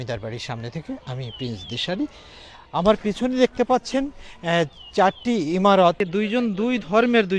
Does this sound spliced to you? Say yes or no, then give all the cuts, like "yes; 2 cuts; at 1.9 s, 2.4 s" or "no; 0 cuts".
yes; 1 cut; at 6.0 s